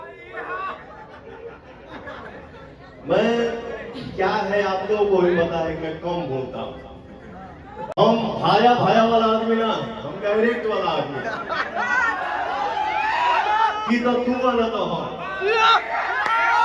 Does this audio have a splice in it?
yes; 1 cut; at 7.9 s

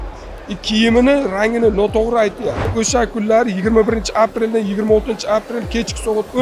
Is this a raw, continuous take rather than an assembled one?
no; 1 cut; at 2.6 s

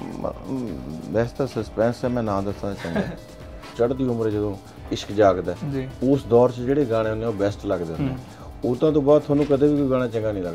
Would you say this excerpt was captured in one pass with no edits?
no; 1 cut; at 3.7 s

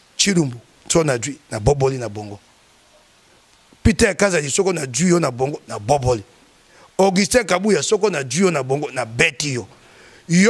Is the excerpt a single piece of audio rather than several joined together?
yes; 0 cuts

